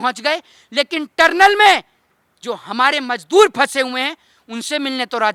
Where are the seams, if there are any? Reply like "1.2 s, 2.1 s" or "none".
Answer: none